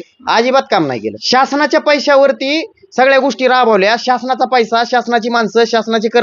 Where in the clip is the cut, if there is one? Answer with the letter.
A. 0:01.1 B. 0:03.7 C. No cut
A